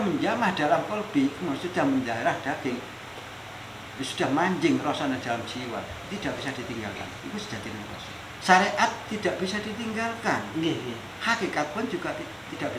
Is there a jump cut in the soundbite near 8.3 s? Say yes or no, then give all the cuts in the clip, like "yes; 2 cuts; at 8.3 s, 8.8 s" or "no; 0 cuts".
yes; 1 cut; at 8.3 s